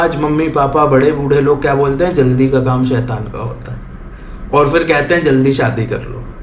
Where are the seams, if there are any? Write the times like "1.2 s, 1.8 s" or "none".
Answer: none